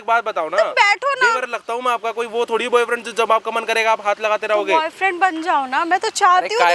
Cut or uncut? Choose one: uncut